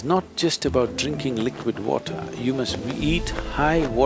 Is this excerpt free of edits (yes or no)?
yes